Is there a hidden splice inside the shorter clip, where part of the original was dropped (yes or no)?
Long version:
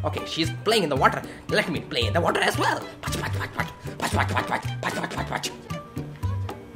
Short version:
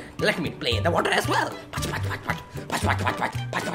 no